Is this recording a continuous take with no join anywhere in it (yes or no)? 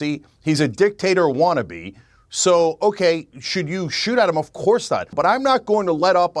no